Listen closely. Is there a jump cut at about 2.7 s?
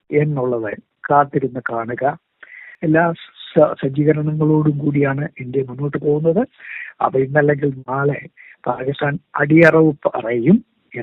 yes; 1 cut; at 2.7 s

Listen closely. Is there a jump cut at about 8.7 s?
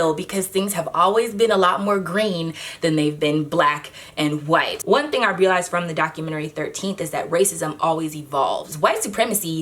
yes; 2 cuts; at 4.8 s, 8.7 s

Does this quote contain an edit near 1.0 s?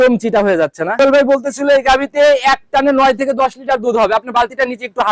yes; 1 cut; at 1.0 s

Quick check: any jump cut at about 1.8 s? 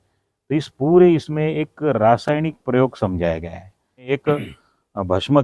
no; 1 cut; at 4.1 s

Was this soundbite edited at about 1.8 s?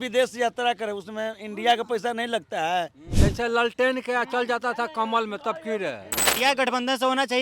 no; 2 cuts; at 3.0 s, 6.3 s

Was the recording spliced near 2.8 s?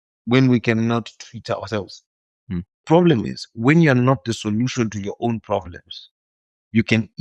yes; 1 cut; at 2.8 s

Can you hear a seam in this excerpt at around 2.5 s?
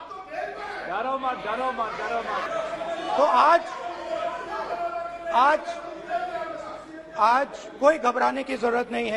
yes; 1 cut; at 2.5 s

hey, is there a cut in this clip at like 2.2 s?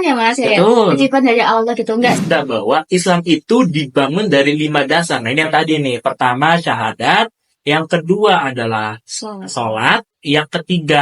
yes; 1 cut; at 2.2 s

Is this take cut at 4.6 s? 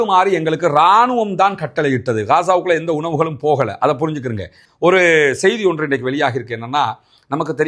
yes; 1 cut; at 4.6 s

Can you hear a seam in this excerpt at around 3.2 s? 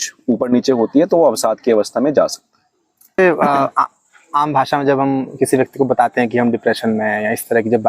yes; 1 cut; at 3.2 s

